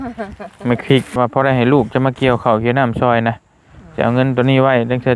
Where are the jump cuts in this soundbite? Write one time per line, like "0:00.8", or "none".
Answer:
0:01.2